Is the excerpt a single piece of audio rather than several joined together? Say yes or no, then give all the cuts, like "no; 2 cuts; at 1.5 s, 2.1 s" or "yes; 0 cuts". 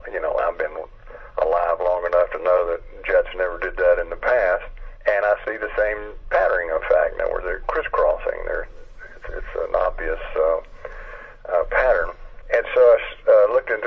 no; 1 cut; at 11.7 s